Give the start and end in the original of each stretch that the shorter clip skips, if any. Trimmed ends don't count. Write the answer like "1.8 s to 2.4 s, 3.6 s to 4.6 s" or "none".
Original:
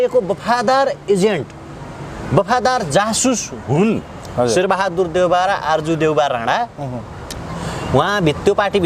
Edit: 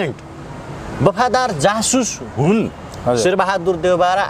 none